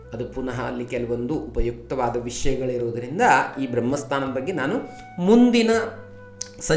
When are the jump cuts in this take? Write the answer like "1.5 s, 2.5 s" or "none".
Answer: none